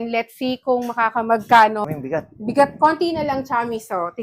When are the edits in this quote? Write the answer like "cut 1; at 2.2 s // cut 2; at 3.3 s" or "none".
cut 1; at 1.8 s